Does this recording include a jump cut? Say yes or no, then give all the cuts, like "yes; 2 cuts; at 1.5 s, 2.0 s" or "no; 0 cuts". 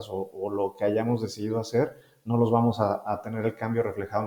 no; 0 cuts